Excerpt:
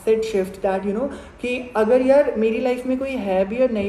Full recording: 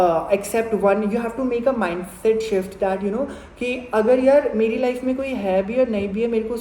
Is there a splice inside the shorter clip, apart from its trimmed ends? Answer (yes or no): no